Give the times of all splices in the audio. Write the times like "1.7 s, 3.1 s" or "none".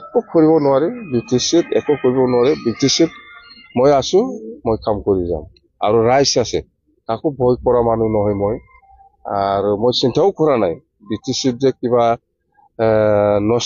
none